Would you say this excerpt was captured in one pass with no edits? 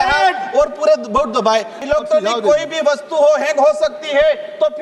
no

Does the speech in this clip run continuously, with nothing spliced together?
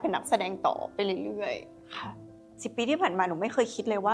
no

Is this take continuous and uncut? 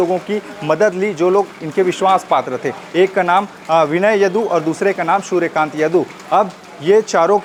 yes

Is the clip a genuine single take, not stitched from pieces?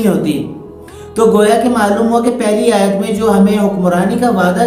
yes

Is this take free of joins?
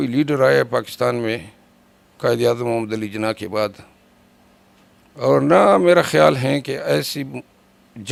yes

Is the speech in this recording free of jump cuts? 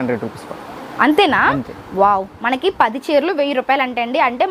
yes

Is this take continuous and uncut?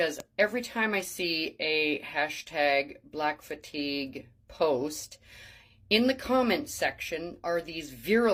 yes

